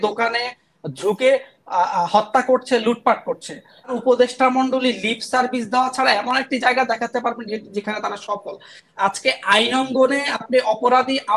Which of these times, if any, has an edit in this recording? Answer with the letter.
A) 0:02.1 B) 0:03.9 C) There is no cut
B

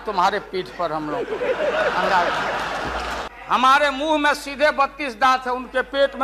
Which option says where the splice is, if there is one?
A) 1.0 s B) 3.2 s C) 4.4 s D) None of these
B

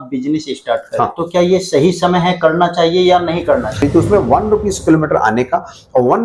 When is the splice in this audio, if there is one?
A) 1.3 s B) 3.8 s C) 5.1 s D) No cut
B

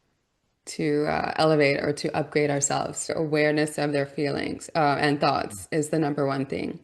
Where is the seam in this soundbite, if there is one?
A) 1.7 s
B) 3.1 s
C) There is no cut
B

